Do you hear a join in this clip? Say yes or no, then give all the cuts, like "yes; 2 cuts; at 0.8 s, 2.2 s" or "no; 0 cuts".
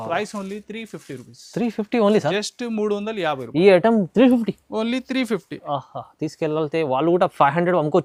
no; 0 cuts